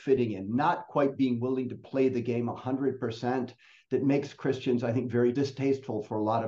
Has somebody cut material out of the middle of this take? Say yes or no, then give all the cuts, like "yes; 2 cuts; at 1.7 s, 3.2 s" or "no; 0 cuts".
yes; 1 cut; at 5.3 s